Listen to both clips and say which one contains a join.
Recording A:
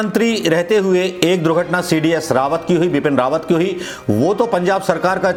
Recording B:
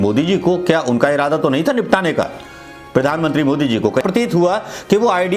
B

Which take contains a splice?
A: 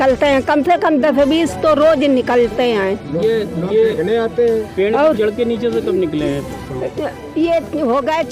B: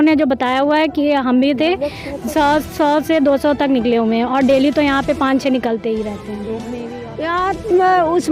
B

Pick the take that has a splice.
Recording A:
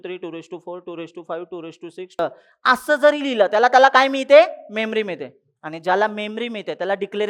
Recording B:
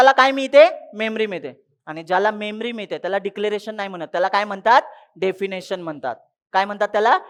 A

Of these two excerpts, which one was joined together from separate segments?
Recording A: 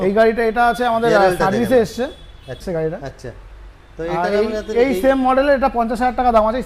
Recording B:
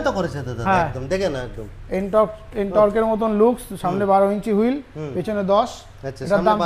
A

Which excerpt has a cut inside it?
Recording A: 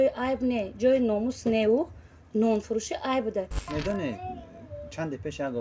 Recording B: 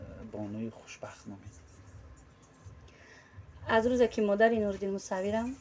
A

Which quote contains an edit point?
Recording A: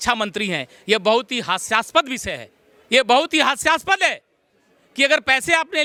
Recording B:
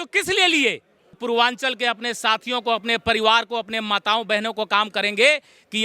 B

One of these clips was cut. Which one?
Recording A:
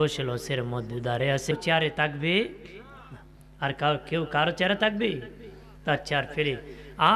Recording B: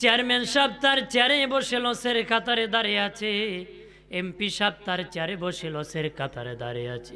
A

